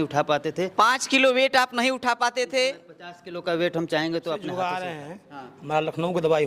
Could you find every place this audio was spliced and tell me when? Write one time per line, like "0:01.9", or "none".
0:04.4